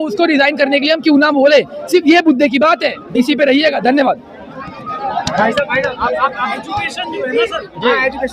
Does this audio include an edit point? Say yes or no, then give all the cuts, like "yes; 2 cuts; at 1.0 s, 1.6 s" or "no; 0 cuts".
no; 0 cuts